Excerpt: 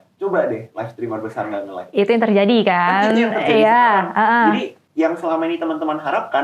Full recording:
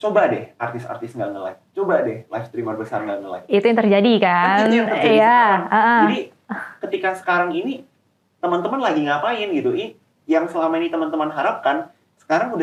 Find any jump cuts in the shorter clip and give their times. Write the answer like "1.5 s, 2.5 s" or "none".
4.8 s